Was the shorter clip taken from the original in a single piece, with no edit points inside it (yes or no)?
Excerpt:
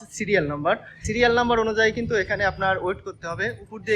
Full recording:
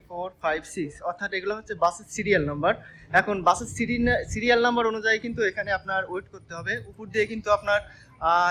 no